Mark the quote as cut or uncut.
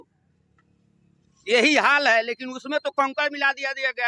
uncut